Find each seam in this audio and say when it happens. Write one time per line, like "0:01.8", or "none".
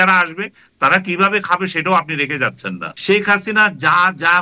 0:02.9

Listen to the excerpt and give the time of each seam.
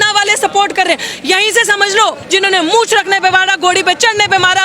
0:02.2

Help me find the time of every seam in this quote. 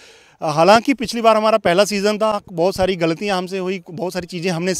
none

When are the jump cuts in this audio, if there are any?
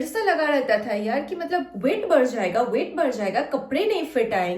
none

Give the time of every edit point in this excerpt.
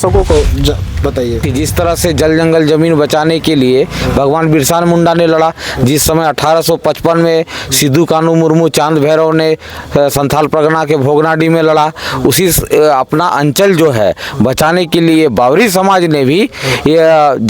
0:01.5

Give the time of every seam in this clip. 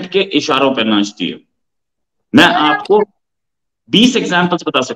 none

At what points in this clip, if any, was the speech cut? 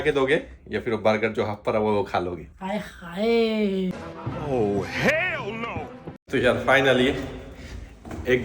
0:06.2

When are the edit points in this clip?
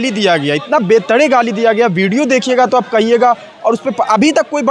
none

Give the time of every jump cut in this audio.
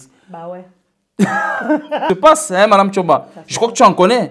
0:02.0

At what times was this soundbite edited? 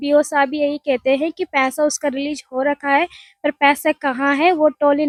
none

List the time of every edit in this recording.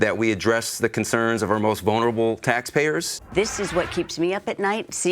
0:03.2

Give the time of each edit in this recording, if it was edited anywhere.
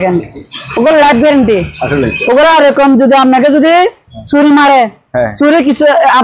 none

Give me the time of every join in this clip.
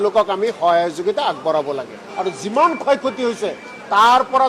0:02.1

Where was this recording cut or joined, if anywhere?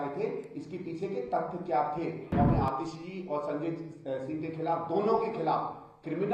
0:02.3

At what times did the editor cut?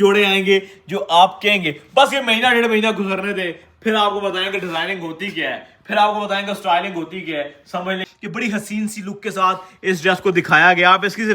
0:08.1

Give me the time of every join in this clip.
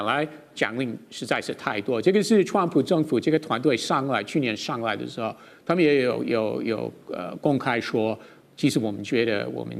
none

